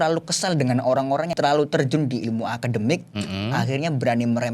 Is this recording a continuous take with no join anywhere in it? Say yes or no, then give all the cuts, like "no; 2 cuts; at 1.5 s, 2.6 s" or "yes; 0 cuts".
no; 1 cut; at 1.3 s